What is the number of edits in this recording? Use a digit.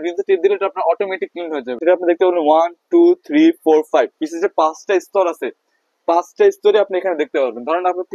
1